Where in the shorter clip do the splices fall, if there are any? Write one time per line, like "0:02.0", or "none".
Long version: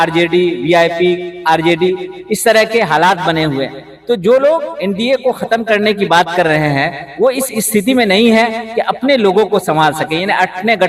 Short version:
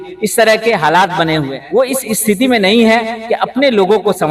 0:01.6